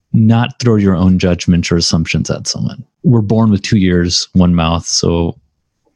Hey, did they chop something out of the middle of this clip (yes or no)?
yes